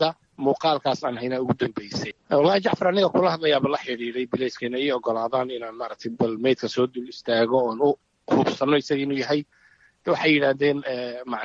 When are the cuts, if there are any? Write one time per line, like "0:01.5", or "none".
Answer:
0:02.1